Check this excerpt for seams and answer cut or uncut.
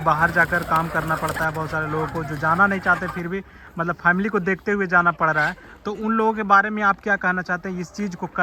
uncut